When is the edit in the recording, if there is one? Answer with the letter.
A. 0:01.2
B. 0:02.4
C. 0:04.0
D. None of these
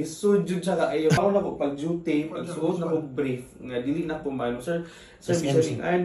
A